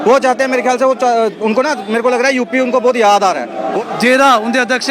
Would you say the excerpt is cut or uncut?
cut